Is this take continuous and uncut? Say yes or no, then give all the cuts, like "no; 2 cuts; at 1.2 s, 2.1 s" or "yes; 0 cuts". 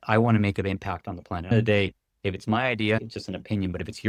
no; 2 cuts; at 1.5 s, 3.0 s